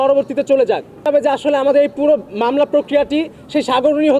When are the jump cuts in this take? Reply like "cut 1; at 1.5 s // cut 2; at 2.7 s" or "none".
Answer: cut 1; at 1.1 s

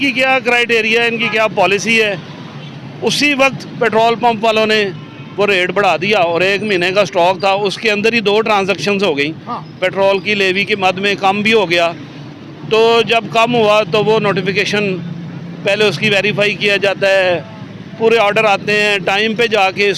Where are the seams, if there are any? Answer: none

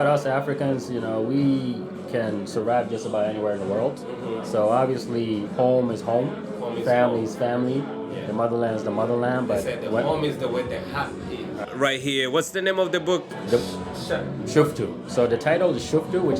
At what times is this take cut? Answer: cut 1; at 11.5 s

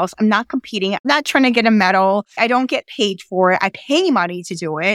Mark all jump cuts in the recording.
cut 1; at 1.0 s

